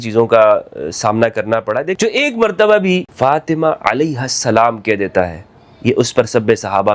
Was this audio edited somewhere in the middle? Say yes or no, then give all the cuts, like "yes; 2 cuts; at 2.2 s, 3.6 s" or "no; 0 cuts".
yes; 2 cuts; at 2.0 s, 3.1 s